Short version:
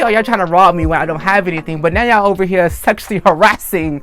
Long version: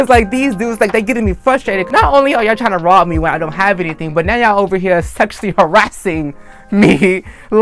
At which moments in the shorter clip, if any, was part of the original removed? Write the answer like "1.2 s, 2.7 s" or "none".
none